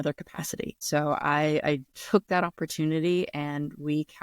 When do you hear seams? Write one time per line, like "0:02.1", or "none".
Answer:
0:00.8
0:01.9